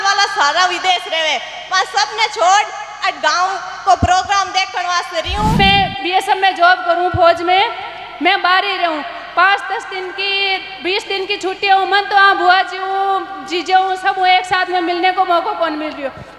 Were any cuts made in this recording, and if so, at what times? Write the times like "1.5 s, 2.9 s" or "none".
5.6 s